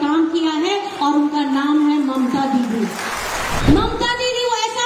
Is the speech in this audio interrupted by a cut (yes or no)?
yes